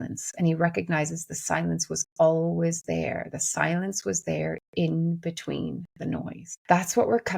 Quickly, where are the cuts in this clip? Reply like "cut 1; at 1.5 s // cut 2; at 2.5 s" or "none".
cut 1; at 6.5 s